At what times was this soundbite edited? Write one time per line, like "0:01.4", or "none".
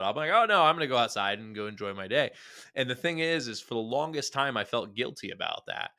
none